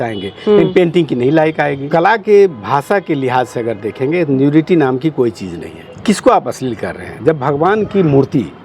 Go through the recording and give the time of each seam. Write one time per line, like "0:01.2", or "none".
0:01.9
0:06.0